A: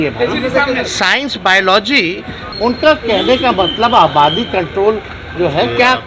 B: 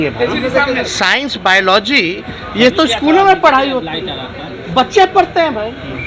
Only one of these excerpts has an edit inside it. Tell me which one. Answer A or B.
A